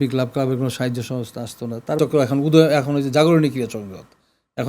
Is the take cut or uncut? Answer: cut